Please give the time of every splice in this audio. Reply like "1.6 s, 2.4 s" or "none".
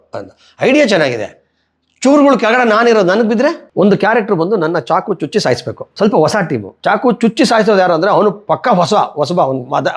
3.6 s, 5.8 s, 6.7 s